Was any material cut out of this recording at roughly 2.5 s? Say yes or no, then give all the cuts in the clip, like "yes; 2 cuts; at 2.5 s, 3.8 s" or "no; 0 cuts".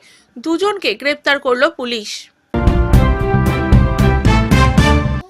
yes; 1 cut; at 2.5 s